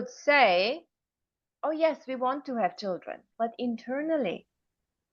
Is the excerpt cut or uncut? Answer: cut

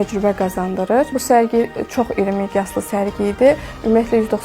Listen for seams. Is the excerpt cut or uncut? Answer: cut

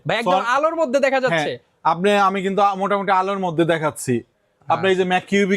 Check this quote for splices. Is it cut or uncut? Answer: uncut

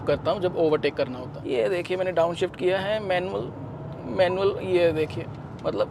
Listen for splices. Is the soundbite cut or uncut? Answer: cut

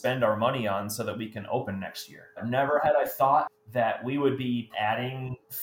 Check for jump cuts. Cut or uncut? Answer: cut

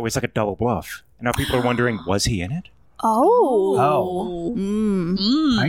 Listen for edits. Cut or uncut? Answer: uncut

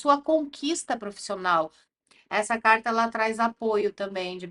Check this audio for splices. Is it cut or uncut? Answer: cut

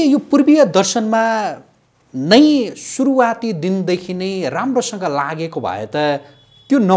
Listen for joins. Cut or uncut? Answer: uncut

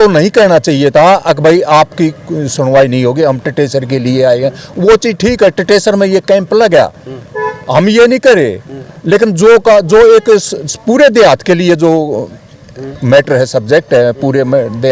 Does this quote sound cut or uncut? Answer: uncut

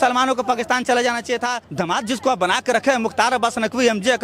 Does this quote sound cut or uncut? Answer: cut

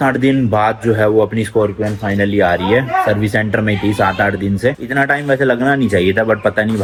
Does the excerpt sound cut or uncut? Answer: uncut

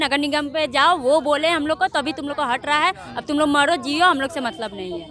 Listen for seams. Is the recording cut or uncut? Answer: uncut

